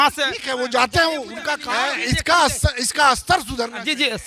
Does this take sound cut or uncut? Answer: cut